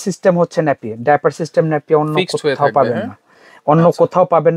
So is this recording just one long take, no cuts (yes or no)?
yes